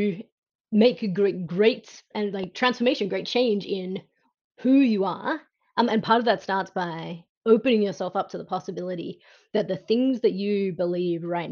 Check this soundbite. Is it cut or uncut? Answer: uncut